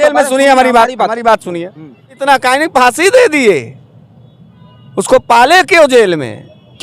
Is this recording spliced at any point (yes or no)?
yes